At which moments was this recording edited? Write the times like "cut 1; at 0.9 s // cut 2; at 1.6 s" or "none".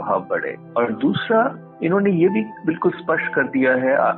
cut 1; at 1.6 s